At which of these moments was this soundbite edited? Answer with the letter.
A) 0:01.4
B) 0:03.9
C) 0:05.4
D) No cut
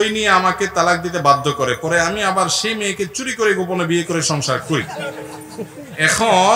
D